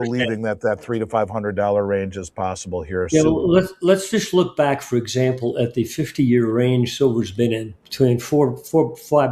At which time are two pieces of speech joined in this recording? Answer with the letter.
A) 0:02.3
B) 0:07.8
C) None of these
B